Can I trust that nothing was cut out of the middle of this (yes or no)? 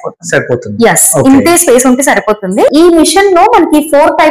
no